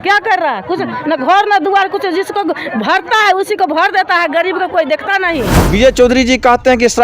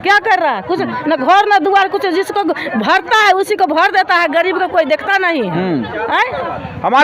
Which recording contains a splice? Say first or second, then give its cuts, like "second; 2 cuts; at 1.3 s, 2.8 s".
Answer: first; 1 cut; at 5.6 s